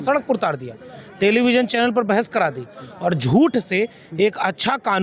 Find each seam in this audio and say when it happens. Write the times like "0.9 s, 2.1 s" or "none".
none